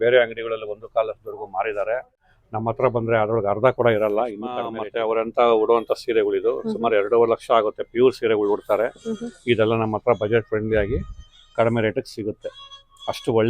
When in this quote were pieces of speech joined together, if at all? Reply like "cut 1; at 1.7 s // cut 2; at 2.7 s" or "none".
cut 1; at 2.2 s // cut 2; at 4.8 s